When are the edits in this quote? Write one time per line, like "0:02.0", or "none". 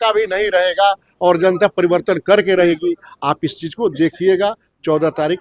none